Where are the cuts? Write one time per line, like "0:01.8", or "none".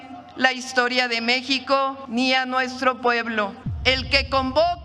0:02.0
0:03.7